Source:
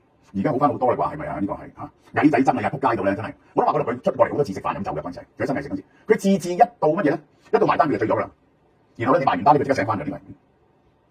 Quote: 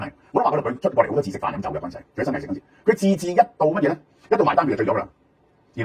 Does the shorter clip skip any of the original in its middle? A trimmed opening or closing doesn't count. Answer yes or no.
no